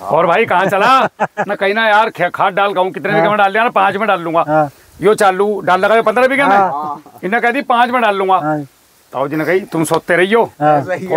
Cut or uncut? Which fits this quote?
uncut